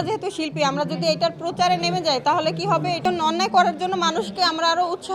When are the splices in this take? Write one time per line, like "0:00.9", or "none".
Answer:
0:03.0